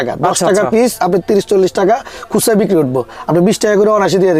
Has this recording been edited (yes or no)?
no